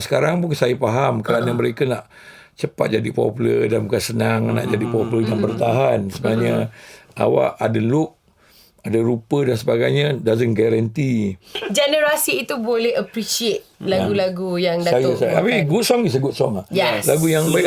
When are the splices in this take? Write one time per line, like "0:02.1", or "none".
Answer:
0:11.5